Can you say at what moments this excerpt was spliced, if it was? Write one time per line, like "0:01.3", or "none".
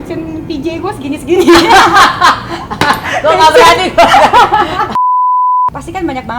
0:04.9